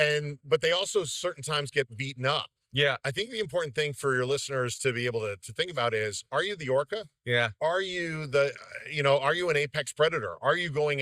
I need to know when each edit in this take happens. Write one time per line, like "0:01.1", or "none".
none